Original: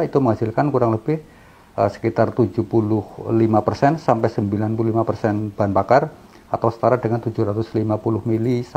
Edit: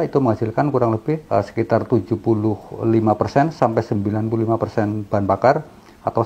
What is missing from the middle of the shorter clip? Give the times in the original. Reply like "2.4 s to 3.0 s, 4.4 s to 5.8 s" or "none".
1.2 s to 1.7 s